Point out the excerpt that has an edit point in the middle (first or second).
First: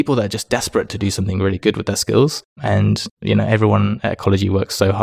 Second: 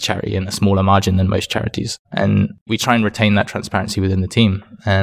second